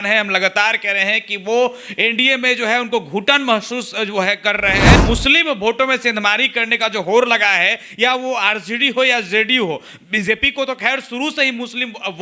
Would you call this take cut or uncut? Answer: cut